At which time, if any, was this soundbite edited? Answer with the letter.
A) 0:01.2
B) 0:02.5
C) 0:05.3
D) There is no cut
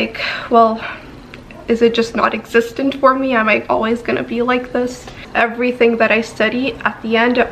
C